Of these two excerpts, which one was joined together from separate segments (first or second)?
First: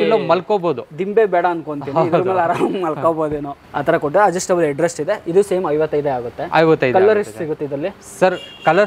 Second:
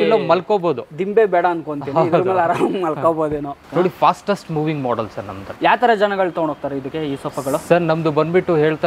second